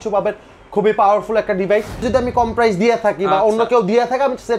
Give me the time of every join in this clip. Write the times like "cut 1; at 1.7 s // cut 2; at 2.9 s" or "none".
cut 1; at 2.1 s